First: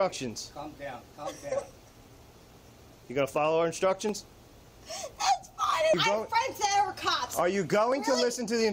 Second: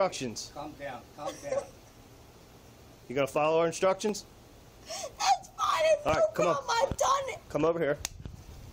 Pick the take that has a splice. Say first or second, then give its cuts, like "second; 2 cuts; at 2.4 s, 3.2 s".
first; 1 cut; at 6.0 s